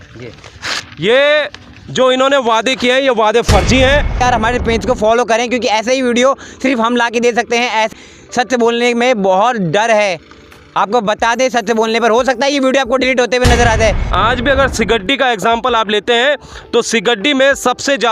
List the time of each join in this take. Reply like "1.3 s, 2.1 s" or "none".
4.2 s, 7.9 s, 14.1 s